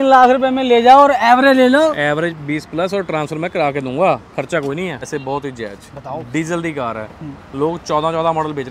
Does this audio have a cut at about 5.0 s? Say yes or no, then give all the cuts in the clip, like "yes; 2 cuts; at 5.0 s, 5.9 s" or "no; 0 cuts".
yes; 1 cut; at 5.0 s